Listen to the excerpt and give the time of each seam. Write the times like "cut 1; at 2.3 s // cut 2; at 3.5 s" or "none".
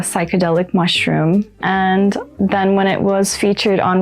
cut 1; at 1.5 s // cut 2; at 2.3 s